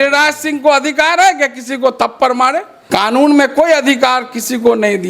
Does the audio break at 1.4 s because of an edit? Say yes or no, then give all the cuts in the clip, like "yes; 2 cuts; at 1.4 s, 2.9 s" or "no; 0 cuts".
no; 1 cut; at 2.8 s